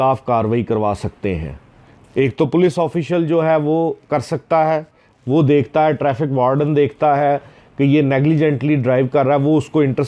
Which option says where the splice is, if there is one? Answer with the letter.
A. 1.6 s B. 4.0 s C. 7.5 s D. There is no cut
D